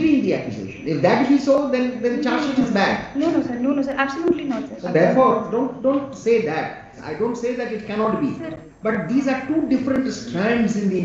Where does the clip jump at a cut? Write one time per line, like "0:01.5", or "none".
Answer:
0:07.0